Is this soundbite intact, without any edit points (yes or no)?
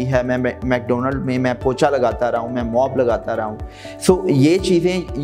yes